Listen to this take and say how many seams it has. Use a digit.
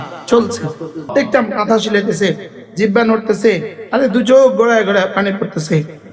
1